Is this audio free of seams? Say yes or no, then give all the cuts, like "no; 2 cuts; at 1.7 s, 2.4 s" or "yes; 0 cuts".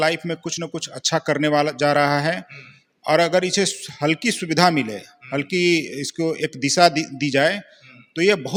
yes; 0 cuts